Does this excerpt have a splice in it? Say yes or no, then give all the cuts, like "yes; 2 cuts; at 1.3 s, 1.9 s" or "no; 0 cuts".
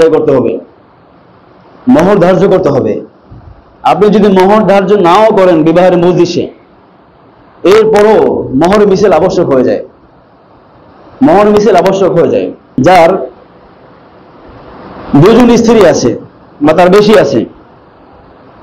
yes; 1 cut; at 12.8 s